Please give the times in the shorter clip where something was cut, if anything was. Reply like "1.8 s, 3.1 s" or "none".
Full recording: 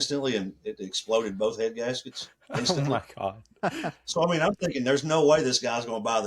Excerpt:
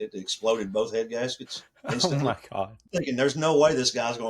2.9 s